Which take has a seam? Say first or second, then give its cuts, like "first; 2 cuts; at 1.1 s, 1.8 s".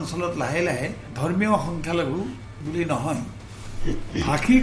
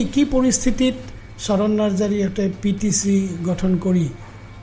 first; 2 cuts; at 1.0 s, 2.5 s